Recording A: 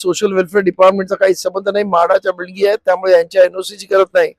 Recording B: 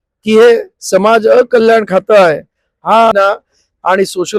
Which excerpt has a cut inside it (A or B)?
B